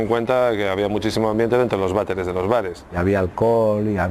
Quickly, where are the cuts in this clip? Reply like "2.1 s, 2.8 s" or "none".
none